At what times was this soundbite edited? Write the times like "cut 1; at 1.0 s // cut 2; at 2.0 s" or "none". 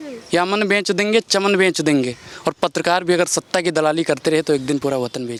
none